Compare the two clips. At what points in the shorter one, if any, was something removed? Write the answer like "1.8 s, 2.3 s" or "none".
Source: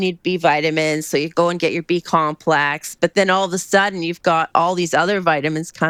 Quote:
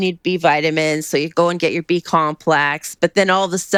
none

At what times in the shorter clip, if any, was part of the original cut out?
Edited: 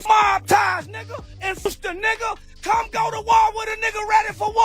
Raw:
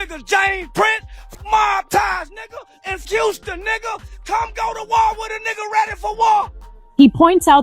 1.7 s

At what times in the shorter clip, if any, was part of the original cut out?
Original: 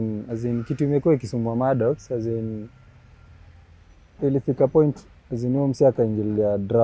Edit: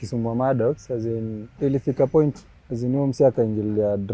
1.4 s

